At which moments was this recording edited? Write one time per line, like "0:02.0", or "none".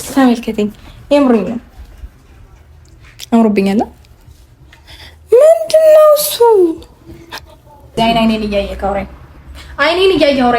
0:08.0